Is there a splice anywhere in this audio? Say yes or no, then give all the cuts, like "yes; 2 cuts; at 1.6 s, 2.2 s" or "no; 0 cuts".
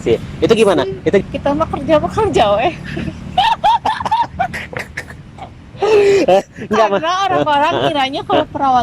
yes; 1 cut; at 1.2 s